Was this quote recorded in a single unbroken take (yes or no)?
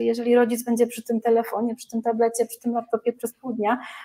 yes